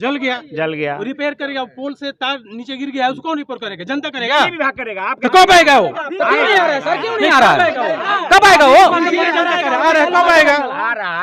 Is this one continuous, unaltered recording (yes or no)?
yes